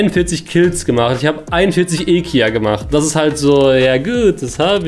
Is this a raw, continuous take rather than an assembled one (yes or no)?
yes